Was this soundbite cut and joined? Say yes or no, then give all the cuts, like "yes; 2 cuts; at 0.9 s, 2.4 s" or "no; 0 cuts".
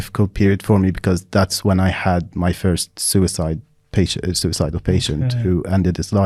no; 0 cuts